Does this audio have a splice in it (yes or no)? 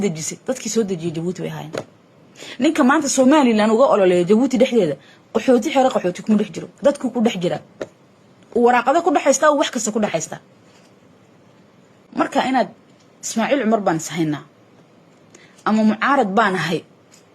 yes